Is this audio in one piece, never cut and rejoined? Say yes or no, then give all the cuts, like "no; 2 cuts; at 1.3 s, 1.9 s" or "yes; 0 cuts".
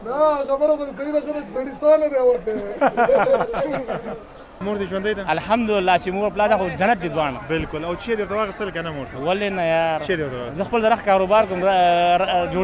no; 1 cut; at 4.5 s